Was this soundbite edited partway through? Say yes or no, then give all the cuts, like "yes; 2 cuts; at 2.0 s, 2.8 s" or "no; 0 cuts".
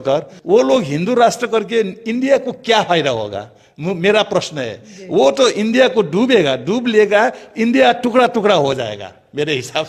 no; 0 cuts